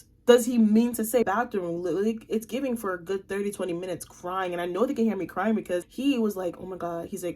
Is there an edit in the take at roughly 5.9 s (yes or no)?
yes